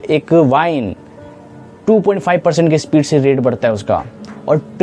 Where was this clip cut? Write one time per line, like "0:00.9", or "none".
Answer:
none